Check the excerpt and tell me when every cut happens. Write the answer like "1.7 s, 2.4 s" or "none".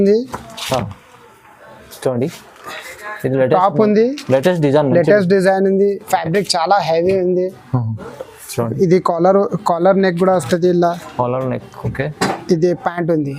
none